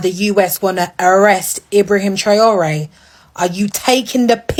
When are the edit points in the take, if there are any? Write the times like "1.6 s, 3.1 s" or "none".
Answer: none